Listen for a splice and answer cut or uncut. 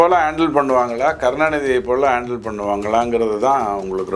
uncut